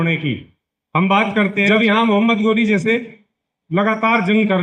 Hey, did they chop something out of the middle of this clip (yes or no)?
yes